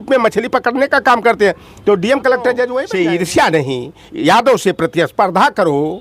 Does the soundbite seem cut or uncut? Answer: cut